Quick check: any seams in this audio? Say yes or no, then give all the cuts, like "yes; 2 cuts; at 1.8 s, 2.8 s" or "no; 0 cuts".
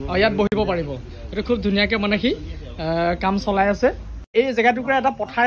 yes; 1 cut; at 4.3 s